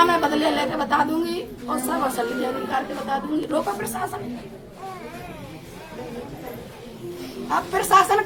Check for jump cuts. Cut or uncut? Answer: uncut